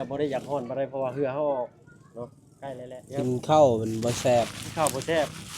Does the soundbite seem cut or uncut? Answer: cut